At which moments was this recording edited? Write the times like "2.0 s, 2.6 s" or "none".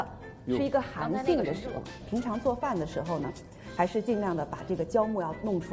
2.0 s